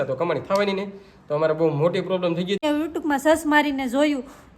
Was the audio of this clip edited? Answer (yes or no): yes